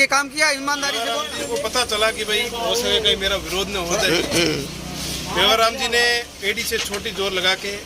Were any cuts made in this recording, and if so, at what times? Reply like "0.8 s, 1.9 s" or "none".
1.1 s